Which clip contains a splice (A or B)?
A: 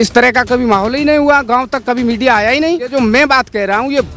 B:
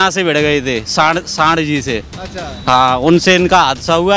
A